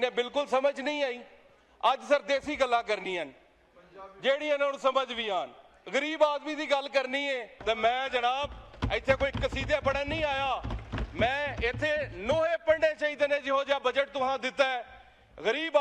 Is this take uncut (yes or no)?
no